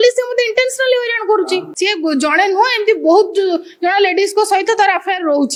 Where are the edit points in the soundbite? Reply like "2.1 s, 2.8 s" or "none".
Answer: none